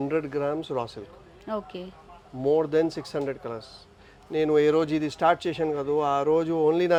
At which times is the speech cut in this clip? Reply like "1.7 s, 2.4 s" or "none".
none